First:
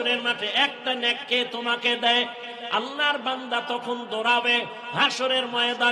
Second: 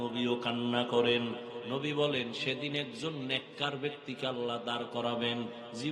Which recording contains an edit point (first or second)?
second